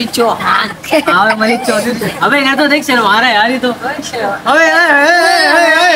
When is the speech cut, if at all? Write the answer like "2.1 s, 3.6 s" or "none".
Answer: none